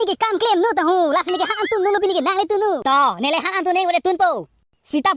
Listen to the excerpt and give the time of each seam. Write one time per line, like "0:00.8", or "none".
0:02.8